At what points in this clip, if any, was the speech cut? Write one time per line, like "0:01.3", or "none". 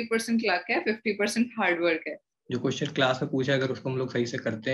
0:02.3